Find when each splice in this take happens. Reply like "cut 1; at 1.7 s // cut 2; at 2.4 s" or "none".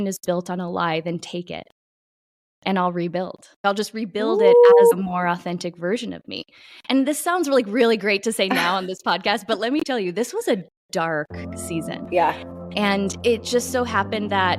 cut 1; at 13.1 s